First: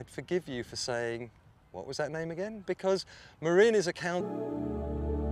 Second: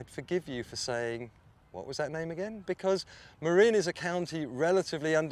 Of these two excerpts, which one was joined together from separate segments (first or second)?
second